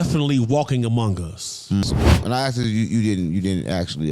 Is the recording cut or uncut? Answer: cut